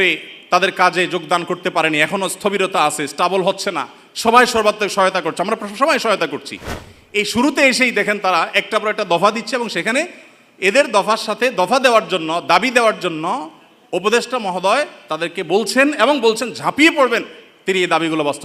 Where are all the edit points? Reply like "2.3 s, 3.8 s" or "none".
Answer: none

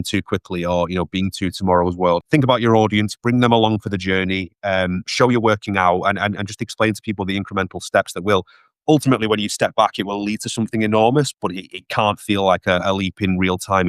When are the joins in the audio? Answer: 2.2 s

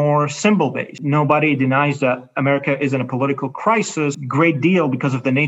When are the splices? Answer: 0.9 s, 4.2 s

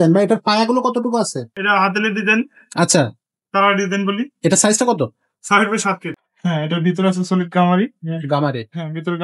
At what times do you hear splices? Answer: 1.5 s, 6.1 s

